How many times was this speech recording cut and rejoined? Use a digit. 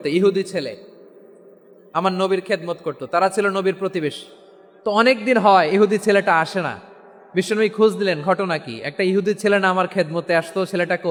0